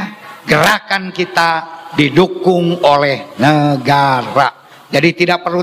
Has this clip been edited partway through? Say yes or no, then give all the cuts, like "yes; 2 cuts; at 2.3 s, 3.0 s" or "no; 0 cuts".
no; 0 cuts